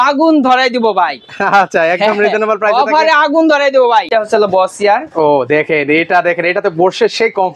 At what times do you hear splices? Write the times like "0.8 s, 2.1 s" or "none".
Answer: 4.1 s